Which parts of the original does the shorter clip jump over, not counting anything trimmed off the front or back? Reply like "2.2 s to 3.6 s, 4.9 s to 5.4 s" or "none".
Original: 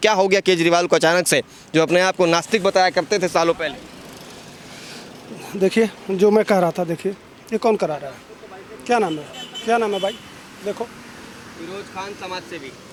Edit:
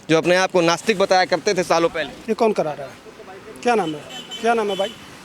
3.8 s to 7.4 s